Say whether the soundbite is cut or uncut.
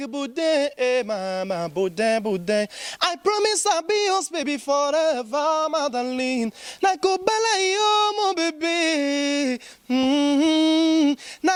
uncut